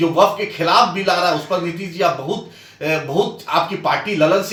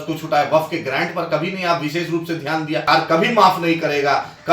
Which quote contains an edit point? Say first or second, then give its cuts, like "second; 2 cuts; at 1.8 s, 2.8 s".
second; 1 cut; at 2.8 s